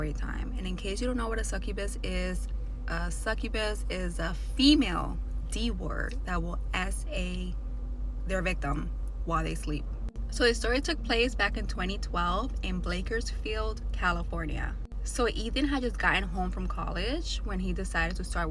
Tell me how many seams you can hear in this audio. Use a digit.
0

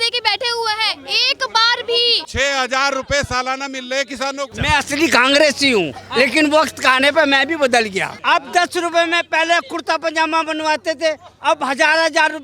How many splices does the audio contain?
3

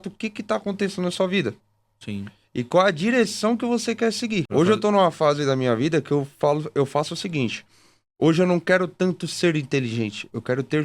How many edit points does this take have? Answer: 1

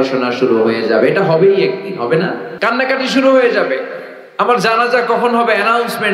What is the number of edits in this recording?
1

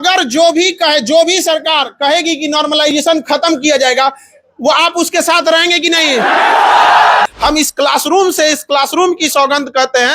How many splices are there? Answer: 1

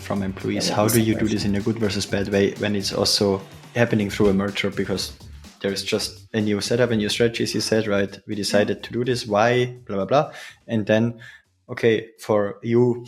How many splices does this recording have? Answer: 1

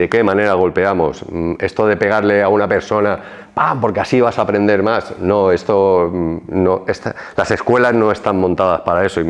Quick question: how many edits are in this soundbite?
0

